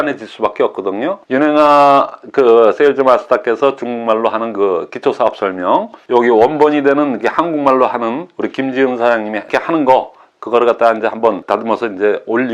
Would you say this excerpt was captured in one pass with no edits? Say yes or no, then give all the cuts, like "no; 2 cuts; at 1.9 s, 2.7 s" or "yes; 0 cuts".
no; 2 cuts; at 1.2 s, 6.0 s